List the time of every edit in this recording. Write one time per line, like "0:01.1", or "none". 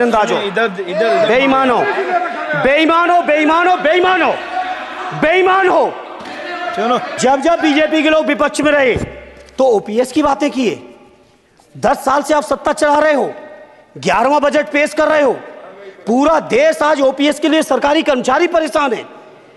0:07.1